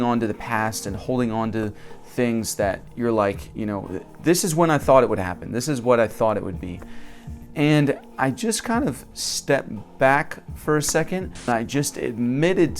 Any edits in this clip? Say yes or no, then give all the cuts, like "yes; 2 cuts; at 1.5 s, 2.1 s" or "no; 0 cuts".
yes; 1 cut; at 11.5 s